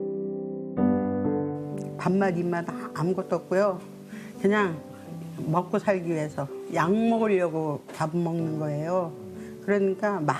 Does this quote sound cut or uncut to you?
uncut